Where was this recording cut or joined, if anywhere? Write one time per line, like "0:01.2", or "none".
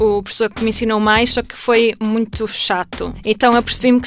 0:03.2